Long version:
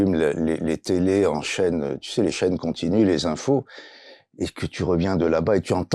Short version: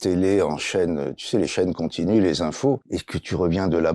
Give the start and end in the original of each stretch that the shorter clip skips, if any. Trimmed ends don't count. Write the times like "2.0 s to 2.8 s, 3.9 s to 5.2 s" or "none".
3.8 s to 4.4 s